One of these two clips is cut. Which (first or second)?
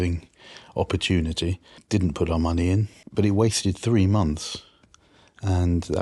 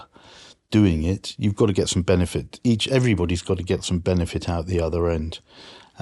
first